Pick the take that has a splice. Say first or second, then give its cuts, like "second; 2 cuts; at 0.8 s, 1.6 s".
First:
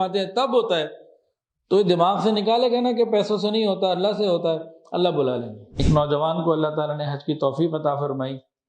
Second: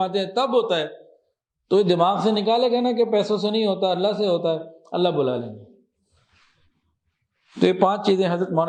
first; 1 cut; at 5.6 s